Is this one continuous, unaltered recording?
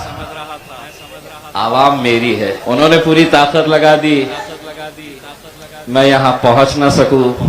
no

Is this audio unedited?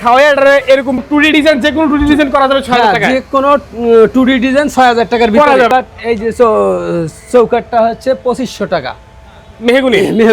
no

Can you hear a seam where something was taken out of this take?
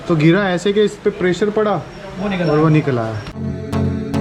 no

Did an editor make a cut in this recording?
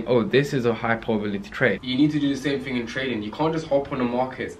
yes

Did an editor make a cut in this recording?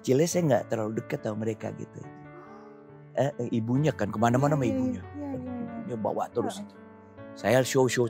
no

